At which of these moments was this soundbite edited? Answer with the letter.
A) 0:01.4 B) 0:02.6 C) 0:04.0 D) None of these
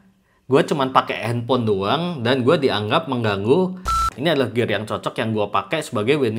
C